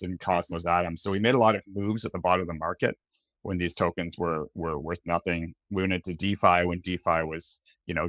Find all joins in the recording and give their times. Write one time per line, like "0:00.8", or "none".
none